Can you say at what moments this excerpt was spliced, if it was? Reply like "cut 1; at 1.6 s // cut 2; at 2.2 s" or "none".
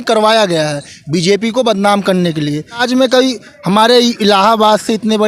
cut 1; at 2.8 s